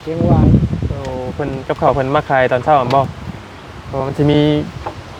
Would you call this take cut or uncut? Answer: uncut